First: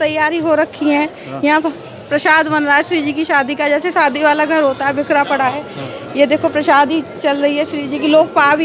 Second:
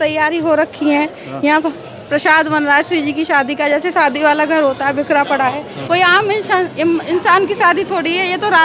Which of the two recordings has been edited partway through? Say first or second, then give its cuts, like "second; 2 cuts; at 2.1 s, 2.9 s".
second; 1 cut; at 5.7 s